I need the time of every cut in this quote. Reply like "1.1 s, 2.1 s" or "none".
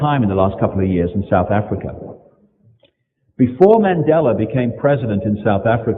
4.0 s